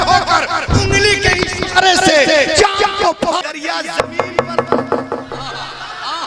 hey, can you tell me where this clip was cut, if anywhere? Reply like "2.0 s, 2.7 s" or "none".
3.4 s